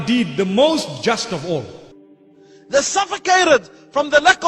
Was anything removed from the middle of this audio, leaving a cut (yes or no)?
yes